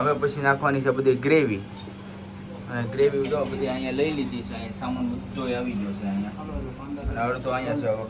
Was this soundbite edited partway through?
no; 0 cuts

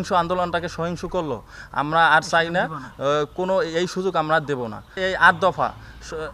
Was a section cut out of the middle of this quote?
yes; 1 cut; at 5.0 s

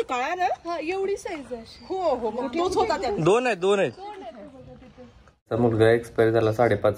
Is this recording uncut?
no; 1 cut; at 5.5 s

